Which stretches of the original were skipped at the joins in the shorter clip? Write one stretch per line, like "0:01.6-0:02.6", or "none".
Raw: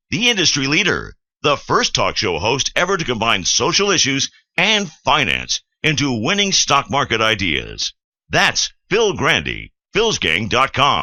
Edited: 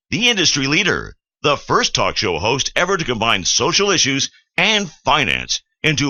none

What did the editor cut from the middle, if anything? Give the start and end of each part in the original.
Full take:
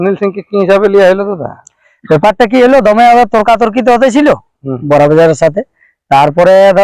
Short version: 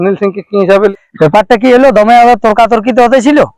0:00.9-0:01.8

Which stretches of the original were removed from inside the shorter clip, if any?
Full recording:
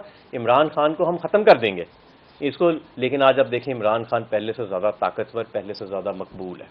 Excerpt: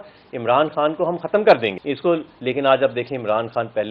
0:01.8-0:02.4

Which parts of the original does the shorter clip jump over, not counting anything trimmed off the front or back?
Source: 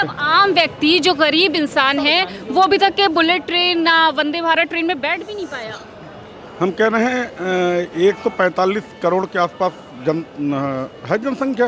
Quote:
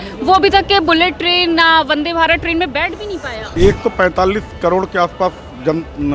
0:05.8-0:07.9

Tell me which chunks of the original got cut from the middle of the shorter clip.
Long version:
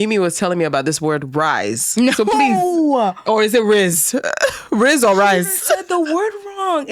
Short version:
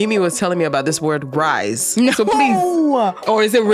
none

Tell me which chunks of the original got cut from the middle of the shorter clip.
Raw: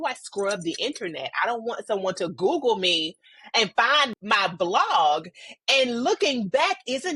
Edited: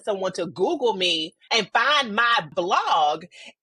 0:03.1-0:03.4

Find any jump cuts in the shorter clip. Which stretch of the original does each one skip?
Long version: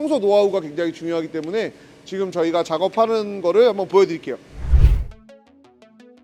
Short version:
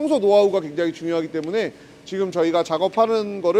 none

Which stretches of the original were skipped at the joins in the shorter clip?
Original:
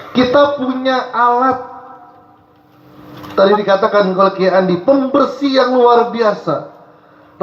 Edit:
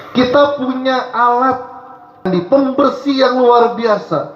0:02.3-0:04.6

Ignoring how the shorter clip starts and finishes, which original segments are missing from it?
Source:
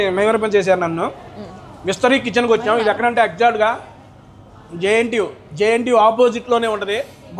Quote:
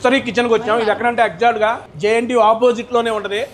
0:03.9-0:05.4

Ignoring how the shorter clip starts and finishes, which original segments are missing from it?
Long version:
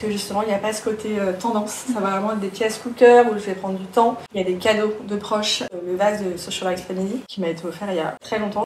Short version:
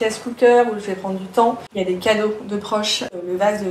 none

